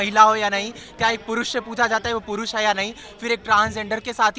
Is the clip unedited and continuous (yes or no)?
yes